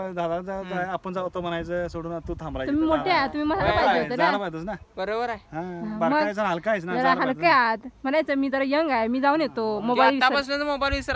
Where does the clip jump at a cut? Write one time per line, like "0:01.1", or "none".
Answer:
none